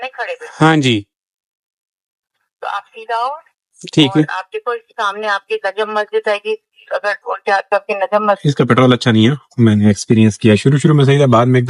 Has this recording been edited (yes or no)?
yes